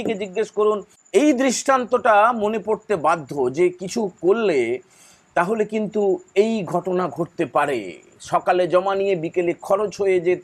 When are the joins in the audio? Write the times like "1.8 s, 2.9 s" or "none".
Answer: 0.9 s